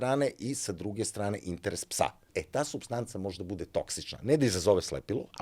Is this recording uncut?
no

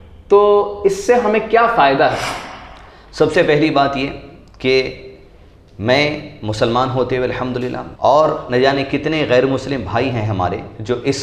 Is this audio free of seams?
no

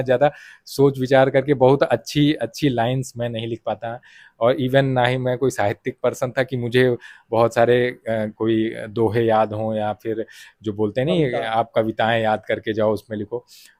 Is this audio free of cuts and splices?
yes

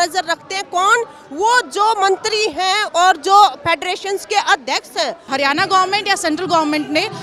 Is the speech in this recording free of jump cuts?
no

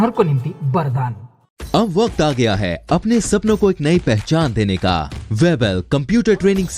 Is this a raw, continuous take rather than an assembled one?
no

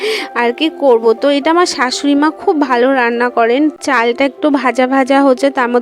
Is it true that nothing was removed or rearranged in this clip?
yes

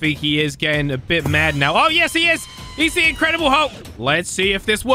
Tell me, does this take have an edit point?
yes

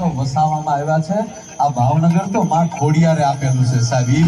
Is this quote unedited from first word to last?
yes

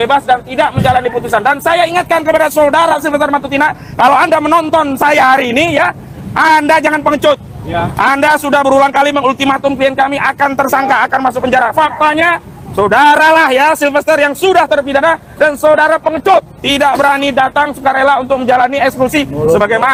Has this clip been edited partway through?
no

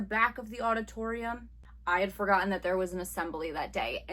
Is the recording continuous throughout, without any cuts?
no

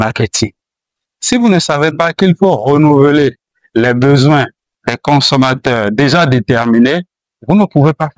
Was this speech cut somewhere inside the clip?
no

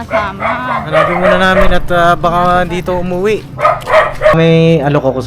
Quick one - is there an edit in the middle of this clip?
yes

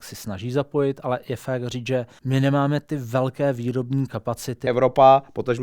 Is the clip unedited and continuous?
no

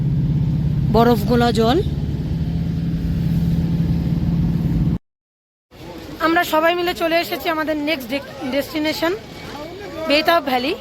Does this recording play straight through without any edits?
no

